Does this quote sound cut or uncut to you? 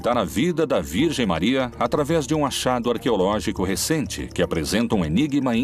uncut